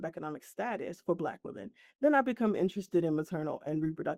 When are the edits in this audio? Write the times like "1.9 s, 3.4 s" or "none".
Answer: none